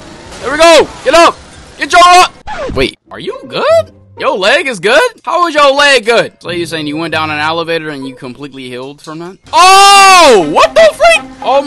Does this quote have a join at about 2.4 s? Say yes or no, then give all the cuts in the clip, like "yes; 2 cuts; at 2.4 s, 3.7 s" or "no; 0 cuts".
yes; 2 cuts; at 2.4 s, 9.4 s